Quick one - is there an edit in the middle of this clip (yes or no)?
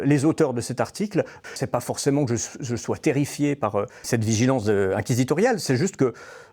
yes